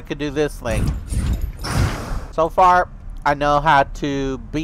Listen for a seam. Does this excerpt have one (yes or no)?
yes